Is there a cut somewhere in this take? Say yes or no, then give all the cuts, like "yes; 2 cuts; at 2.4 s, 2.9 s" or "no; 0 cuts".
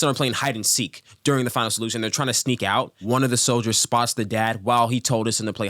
yes; 1 cut; at 3.0 s